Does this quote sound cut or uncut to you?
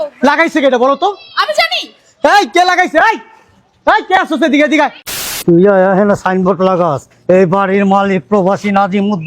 cut